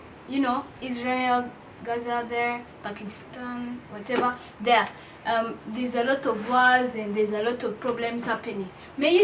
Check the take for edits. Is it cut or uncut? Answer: uncut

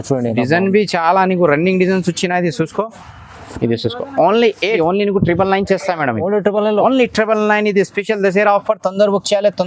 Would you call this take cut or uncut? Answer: cut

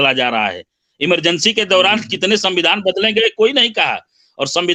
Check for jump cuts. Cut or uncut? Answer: uncut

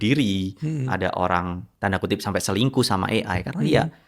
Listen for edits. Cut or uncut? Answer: cut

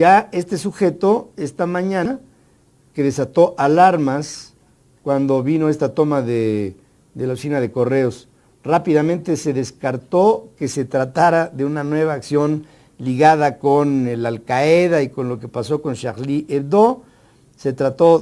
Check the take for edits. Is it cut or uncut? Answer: uncut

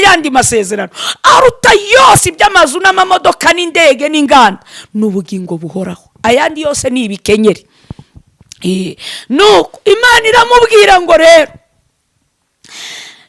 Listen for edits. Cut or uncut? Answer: uncut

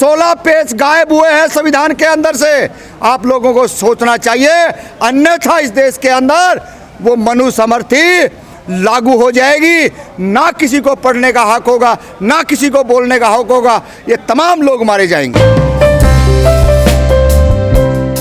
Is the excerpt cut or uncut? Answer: uncut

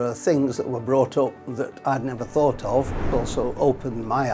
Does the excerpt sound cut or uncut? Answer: cut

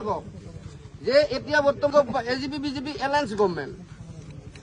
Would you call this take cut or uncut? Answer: cut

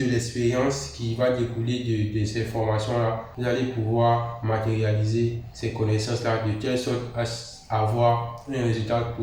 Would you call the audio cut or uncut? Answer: cut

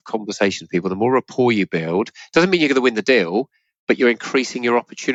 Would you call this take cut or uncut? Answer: uncut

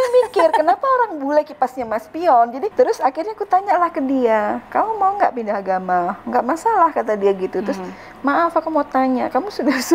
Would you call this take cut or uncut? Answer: cut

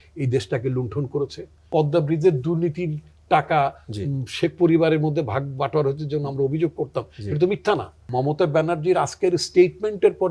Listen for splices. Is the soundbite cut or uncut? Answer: cut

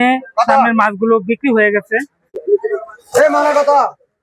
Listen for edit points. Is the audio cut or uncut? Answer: cut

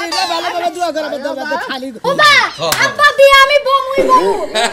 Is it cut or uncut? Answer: cut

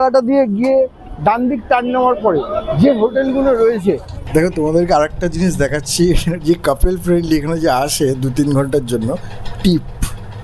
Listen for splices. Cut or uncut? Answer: cut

